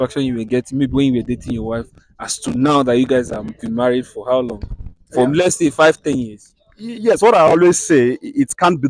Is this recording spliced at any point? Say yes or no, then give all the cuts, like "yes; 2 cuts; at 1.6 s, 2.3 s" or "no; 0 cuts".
no; 0 cuts